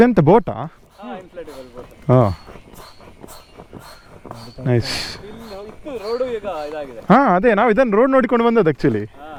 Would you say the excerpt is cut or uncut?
uncut